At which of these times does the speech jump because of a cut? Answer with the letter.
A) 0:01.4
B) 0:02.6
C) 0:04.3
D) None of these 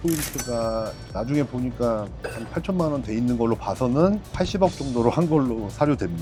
D